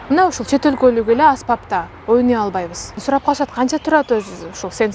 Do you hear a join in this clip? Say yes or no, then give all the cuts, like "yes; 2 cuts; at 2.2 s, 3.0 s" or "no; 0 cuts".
yes; 1 cut; at 3.0 s